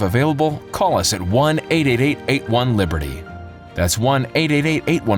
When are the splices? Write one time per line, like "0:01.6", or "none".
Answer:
none